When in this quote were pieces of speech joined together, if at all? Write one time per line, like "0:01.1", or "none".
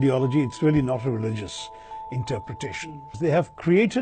0:03.1